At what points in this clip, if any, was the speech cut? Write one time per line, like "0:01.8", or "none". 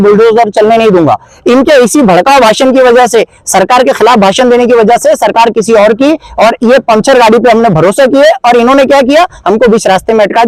none

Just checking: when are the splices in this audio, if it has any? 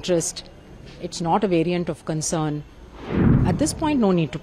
0:03.2

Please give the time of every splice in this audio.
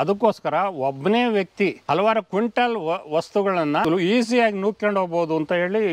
0:01.8
0:03.8

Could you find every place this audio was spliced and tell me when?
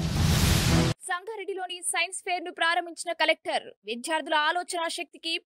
0:01.0

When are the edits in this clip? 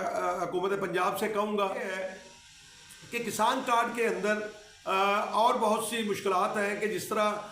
0:01.9

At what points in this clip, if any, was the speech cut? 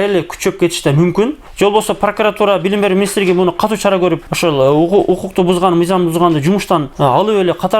0:01.4

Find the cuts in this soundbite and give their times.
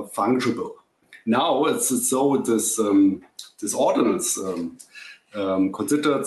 0:01.1

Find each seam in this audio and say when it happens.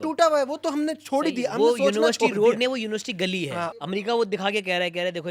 0:03.8

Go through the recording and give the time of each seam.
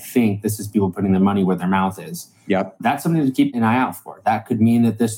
0:03.5

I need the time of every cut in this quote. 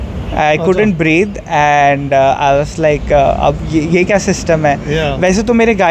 none

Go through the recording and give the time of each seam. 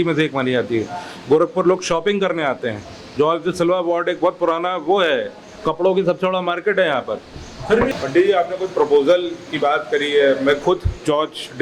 0:07.9

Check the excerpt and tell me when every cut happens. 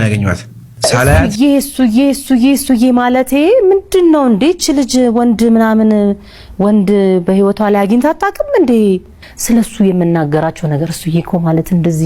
0:01.3

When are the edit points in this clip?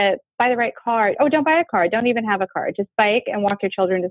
none

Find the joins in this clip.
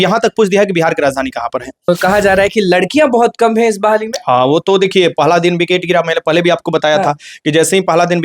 0:01.9

